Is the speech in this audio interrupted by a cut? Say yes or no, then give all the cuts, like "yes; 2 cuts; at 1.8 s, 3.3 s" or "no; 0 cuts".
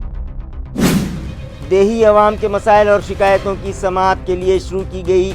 yes; 1 cut; at 1.4 s